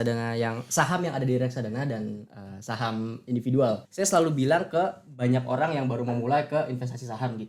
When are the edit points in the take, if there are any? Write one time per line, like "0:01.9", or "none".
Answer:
0:03.9